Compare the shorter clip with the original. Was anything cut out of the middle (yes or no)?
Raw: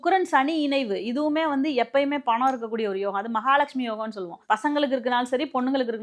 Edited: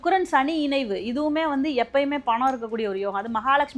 no